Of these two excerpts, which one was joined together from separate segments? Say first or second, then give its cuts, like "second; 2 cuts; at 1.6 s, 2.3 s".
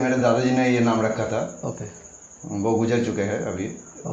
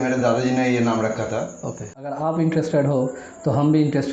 second; 1 cut; at 2.1 s